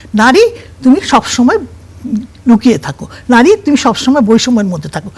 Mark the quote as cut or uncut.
uncut